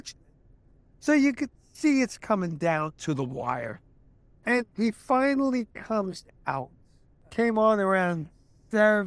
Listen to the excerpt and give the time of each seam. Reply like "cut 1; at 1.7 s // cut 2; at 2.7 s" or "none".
cut 1; at 7.3 s